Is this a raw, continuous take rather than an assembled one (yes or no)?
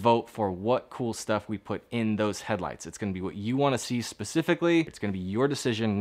no